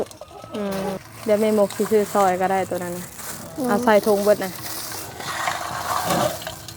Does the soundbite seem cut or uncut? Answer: cut